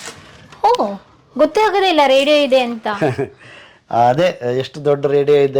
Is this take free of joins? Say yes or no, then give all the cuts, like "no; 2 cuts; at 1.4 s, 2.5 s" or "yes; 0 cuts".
yes; 0 cuts